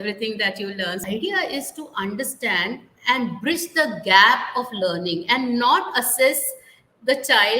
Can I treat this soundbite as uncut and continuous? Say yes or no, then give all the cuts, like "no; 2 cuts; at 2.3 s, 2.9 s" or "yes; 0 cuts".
no; 1 cut; at 1.0 s